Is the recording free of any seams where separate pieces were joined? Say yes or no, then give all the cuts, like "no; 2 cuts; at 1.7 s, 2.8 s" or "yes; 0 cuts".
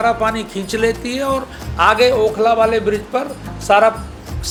yes; 0 cuts